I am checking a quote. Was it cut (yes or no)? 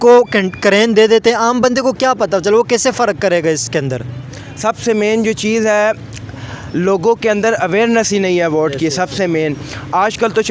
no